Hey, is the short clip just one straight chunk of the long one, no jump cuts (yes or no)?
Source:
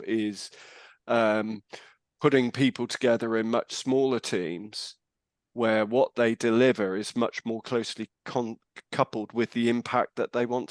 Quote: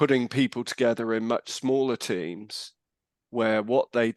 yes